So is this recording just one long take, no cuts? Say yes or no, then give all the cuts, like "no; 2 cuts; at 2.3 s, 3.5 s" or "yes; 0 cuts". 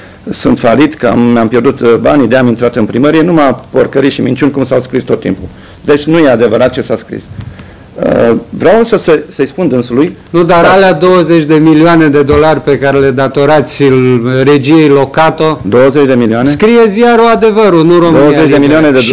yes; 0 cuts